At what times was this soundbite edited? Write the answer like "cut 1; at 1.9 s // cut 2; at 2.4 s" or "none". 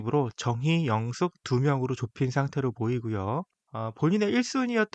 cut 1; at 3.6 s